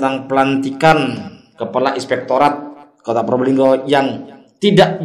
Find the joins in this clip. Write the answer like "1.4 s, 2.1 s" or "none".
none